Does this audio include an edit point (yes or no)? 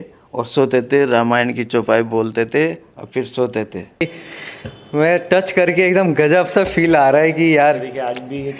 yes